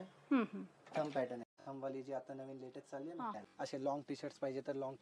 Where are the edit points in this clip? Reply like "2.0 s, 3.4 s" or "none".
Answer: 1.5 s, 3.4 s